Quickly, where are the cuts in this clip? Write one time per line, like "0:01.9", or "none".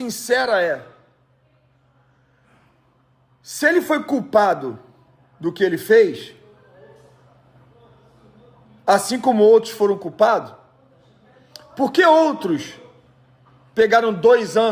none